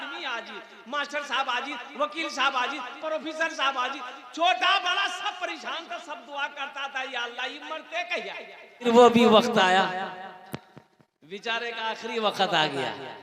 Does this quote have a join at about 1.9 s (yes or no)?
no